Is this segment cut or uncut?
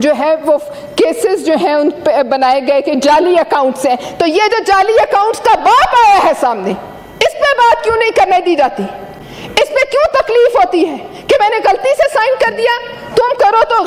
uncut